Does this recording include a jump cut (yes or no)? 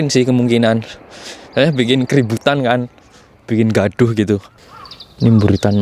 yes